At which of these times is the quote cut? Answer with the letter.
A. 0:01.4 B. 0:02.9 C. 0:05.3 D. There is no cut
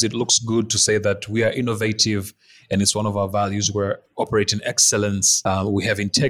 C